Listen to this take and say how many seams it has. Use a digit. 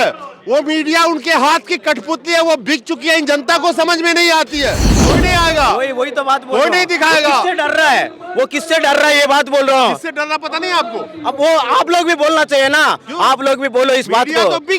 1